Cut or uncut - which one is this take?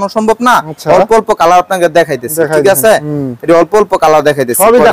uncut